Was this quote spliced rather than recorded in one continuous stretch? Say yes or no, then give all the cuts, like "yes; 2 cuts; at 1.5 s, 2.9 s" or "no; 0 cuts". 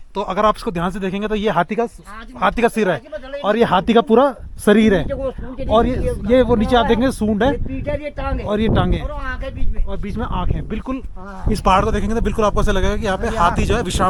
no; 0 cuts